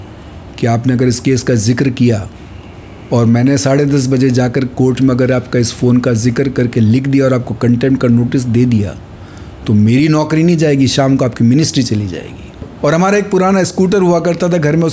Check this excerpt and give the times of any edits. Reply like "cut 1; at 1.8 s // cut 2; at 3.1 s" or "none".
cut 1; at 12.7 s